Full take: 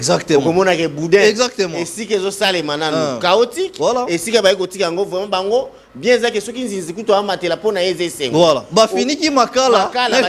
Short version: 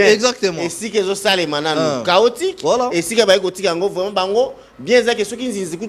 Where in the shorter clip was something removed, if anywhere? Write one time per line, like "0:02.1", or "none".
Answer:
none